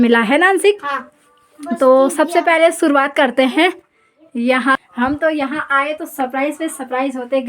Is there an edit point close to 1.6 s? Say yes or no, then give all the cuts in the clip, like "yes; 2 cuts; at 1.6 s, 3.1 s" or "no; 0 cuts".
no; 1 cut; at 4.8 s